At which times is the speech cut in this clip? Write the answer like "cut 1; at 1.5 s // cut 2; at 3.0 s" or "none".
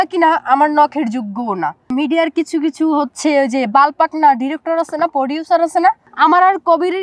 cut 1; at 1.8 s // cut 2; at 6.1 s